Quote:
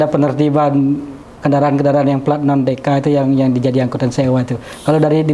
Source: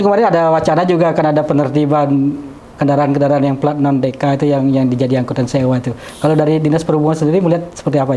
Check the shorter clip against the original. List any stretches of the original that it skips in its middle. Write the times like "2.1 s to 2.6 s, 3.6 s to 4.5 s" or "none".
none

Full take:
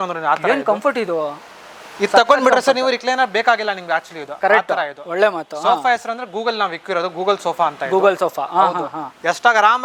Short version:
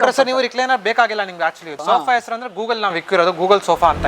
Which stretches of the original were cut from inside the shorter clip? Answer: 4.2 s to 5.5 s

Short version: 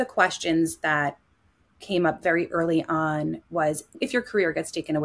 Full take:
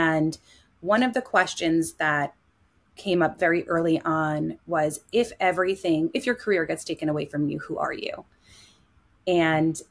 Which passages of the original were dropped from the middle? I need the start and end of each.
5.1 s to 6.1 s

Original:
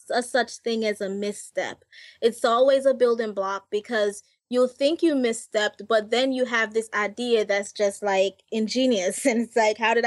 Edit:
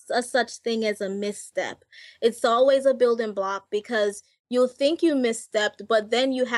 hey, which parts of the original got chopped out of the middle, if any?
none

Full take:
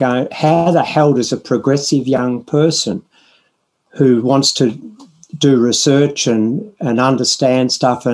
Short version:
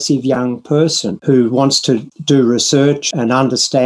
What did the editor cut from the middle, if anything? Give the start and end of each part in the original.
2.9 s to 3.8 s, 4.8 s to 5.3 s, 6.2 s to 6.7 s

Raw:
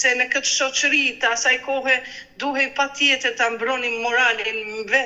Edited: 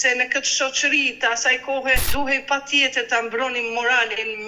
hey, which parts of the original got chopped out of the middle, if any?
2.1 s to 2.3 s

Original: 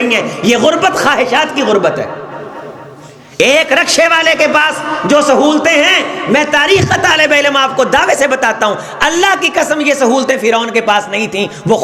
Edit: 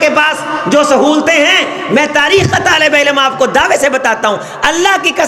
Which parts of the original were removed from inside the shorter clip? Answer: none

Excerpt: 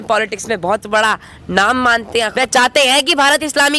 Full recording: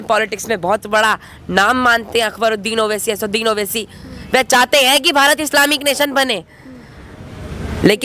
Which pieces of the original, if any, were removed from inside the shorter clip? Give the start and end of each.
2.3 s to 4.3 s

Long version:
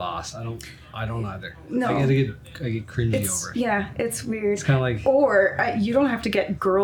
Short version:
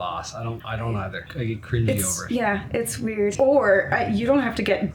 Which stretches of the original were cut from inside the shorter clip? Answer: 1.1 s to 2.3 s, 4.6 s to 5.0 s

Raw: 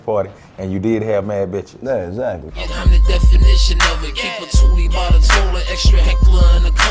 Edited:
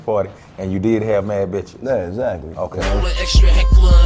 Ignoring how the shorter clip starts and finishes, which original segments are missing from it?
2.8 s to 5.3 s

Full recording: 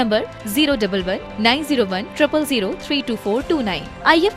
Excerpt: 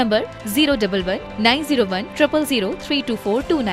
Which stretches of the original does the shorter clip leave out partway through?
none

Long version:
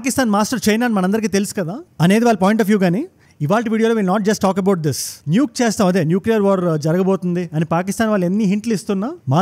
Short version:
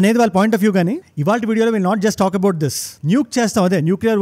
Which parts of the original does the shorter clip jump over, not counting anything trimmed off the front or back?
3.1 s to 3.3 s

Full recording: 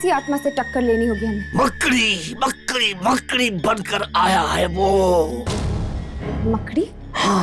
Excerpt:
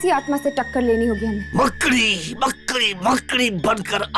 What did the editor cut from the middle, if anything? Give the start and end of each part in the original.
none

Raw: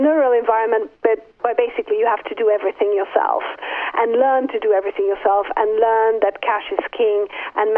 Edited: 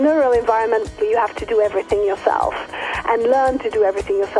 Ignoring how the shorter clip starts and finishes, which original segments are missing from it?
0.9 s to 1.8 s

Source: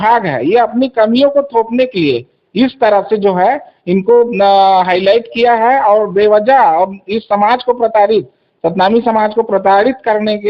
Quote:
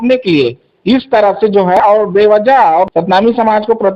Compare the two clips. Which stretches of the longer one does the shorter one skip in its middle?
3.5 s to 5.8 s, 7.0 s to 8.6 s

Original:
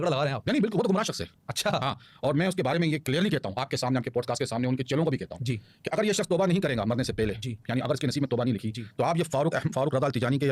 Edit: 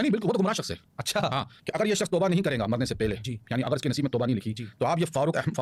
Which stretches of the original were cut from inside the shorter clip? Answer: 2.1 s to 5.7 s

